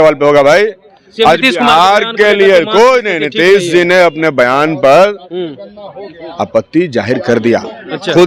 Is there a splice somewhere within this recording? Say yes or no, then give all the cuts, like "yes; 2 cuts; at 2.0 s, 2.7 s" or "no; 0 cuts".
no; 0 cuts